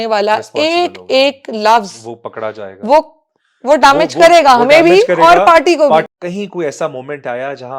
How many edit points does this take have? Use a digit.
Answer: 1